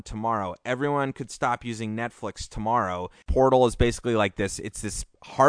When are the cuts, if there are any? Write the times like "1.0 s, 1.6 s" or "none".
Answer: 3.2 s